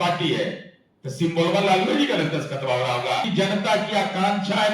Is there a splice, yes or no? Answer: yes